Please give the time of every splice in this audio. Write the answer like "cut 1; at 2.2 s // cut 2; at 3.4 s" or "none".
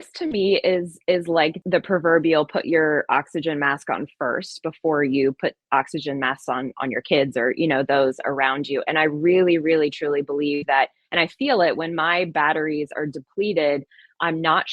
cut 1; at 1.6 s